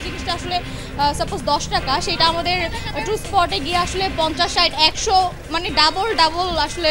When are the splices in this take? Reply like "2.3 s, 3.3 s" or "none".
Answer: none